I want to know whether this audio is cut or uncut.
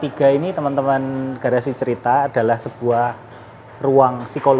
uncut